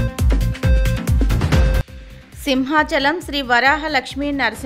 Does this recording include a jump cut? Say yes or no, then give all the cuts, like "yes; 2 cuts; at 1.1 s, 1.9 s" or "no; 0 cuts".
no; 0 cuts